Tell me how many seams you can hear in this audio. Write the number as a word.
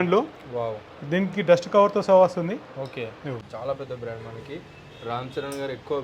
one